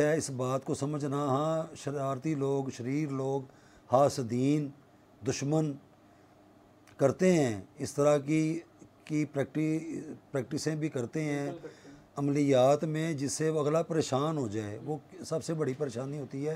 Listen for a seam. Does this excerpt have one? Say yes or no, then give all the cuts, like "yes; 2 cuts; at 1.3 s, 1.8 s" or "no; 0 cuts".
no; 0 cuts